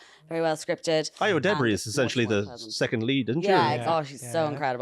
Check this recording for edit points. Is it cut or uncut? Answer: cut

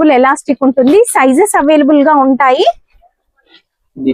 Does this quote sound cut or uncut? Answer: uncut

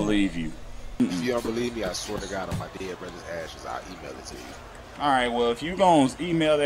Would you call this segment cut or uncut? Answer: cut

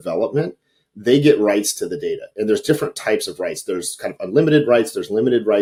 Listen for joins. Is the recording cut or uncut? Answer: uncut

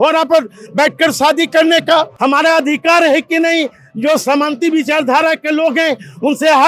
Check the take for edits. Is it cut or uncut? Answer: cut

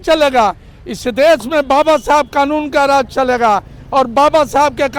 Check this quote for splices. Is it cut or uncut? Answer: uncut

